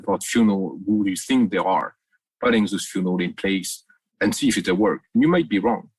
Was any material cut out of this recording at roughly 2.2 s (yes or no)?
no